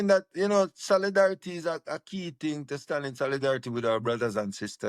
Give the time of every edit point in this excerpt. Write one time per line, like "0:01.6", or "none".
none